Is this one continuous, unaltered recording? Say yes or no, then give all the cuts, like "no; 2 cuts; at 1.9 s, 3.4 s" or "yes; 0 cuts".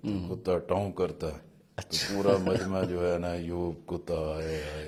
yes; 0 cuts